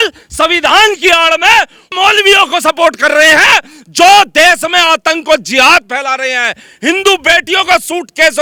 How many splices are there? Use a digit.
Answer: 0